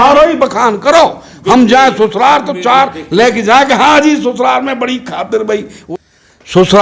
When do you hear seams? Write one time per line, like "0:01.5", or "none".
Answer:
0:05.7